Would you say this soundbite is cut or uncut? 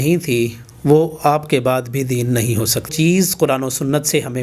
cut